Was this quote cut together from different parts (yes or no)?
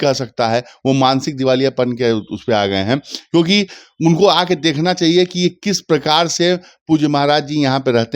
no